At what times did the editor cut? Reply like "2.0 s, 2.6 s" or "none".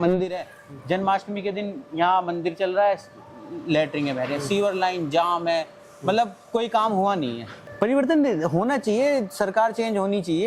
7.6 s